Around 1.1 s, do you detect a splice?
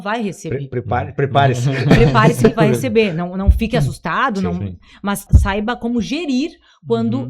no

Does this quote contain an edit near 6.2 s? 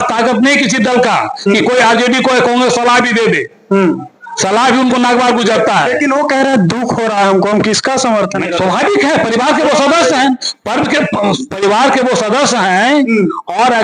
no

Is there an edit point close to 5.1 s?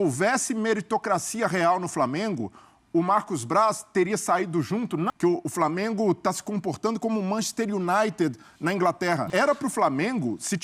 yes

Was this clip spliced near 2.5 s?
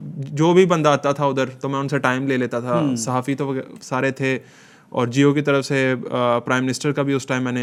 no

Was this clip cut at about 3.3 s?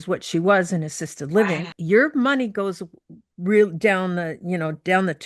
no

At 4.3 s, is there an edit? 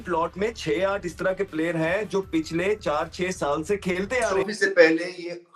yes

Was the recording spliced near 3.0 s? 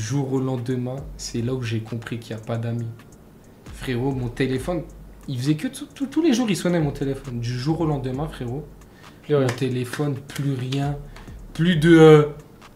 no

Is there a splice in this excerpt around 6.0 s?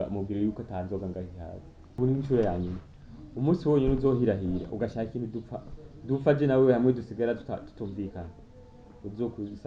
no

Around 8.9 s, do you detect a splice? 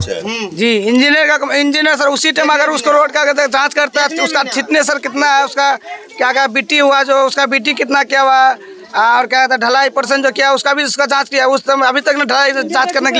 no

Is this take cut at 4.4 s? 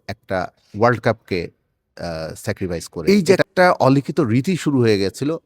no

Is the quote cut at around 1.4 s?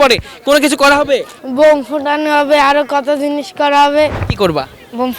yes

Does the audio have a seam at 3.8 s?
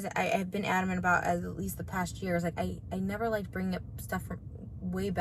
yes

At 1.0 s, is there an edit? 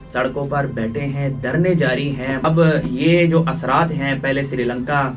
no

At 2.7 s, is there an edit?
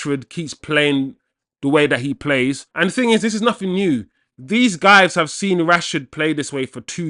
yes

